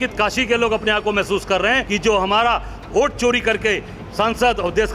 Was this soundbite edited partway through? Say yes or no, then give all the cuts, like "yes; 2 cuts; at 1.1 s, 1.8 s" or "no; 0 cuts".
yes; 1 cut; at 1.9 s